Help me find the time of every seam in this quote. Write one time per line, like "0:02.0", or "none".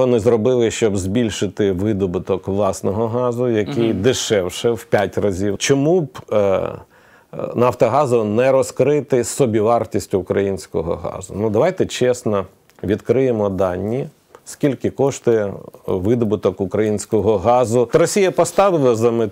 0:05.6
0:17.9